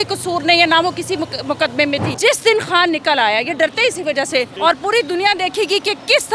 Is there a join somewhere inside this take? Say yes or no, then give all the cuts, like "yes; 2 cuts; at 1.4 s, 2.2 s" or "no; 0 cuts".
yes; 2 cuts; at 2.1 s, 4.5 s